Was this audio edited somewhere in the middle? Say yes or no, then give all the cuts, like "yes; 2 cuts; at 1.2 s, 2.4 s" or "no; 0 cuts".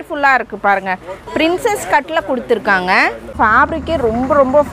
yes; 1 cut; at 3.3 s